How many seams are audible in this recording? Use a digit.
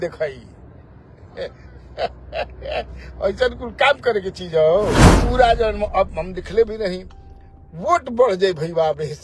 1